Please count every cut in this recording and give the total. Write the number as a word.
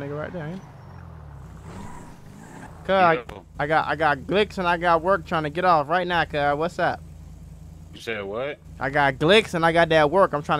one